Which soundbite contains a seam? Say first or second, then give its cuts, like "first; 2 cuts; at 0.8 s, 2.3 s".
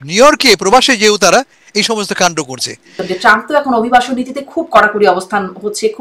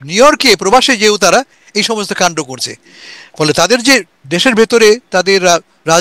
first; 1 cut; at 3.0 s